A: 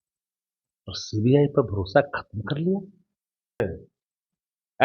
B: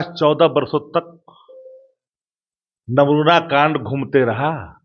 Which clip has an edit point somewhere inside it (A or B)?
A